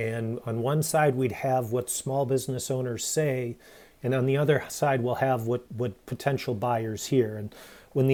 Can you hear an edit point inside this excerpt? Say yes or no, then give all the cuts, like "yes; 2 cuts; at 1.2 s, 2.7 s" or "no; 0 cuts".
no; 0 cuts